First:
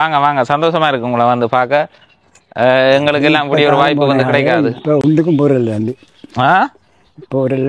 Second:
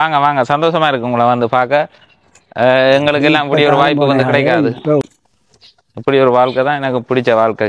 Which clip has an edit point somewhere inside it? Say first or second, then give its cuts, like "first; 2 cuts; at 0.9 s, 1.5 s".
second; 1 cut; at 5.0 s